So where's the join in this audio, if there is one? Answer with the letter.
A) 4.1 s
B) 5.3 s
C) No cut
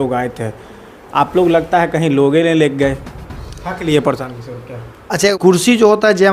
B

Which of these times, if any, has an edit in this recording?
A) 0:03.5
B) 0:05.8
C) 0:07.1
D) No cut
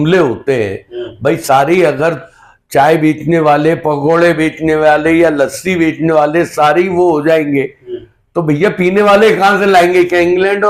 D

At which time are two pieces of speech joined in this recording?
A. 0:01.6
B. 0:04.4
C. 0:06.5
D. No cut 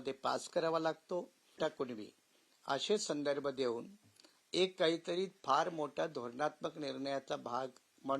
A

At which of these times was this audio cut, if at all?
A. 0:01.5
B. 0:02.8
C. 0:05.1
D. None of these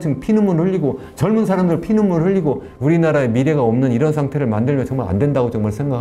B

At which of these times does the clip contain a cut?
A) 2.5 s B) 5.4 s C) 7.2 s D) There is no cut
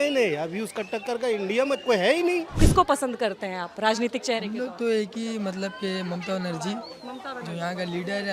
A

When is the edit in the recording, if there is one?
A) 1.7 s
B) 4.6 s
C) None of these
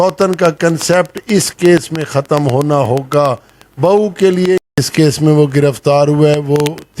B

